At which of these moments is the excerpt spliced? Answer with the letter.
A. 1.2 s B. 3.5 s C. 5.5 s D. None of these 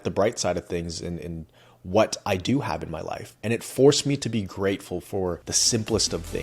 C